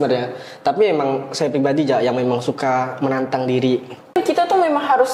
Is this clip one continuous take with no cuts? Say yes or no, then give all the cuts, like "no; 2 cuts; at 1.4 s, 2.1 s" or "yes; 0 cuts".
no; 1 cut; at 4.2 s